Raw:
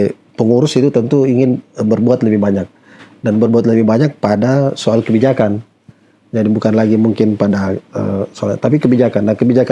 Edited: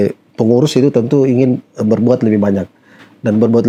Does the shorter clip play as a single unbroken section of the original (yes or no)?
yes